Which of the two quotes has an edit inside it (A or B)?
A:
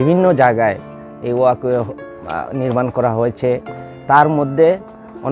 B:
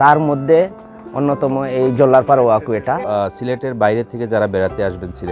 B